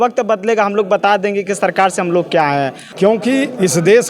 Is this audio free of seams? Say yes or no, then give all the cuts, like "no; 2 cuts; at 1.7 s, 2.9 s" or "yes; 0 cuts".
no; 1 cut; at 2.8 s